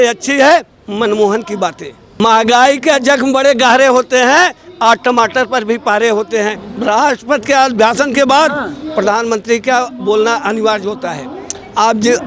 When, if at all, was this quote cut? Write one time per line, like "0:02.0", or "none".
0:02.2
0:06.6